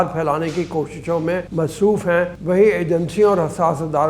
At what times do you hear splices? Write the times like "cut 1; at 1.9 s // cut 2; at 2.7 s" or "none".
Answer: cut 1; at 1.5 s // cut 2; at 2.4 s

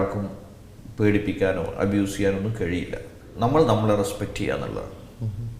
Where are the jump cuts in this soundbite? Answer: cut 1; at 3.2 s

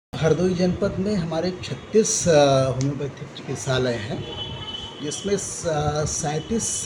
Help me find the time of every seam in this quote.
none

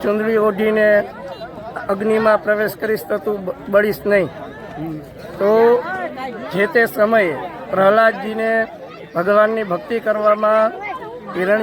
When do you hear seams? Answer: none

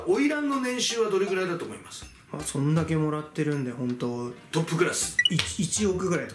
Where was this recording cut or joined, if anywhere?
none

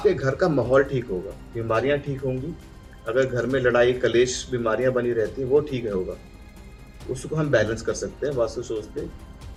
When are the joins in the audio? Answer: none

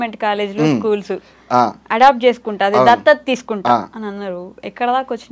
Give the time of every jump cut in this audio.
none

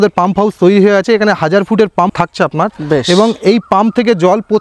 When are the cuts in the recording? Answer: cut 1; at 2.1 s

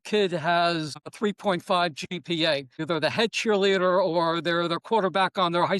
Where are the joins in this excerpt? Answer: cut 1; at 1.0 s // cut 2; at 2.8 s

